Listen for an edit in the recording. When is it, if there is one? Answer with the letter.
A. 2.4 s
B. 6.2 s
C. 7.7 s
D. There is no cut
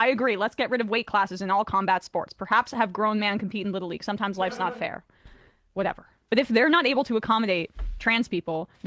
B